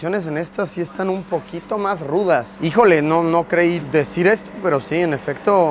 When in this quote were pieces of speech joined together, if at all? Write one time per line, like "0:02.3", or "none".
none